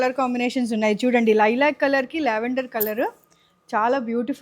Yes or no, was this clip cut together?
no